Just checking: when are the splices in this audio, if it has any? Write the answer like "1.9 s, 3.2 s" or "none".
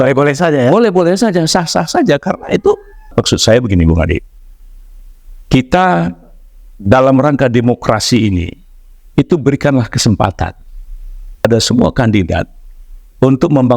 3.1 s, 11.4 s